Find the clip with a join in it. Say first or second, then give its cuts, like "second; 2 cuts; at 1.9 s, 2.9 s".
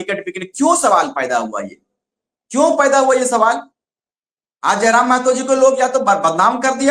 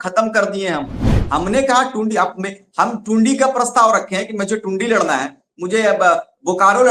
second; 1 cut; at 1.1 s